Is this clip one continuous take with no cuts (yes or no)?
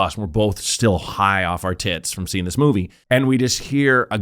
no